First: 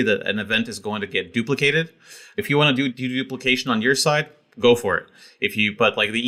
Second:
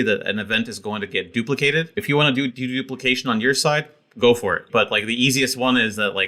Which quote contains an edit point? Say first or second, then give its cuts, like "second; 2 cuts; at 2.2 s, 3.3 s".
second; 2 cuts; at 1.9 s, 4.6 s